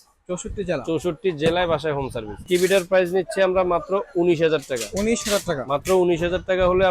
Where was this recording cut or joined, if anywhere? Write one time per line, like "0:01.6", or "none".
0:02.4